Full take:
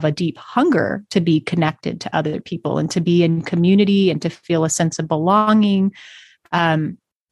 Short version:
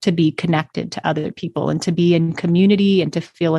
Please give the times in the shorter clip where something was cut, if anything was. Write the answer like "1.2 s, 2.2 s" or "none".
none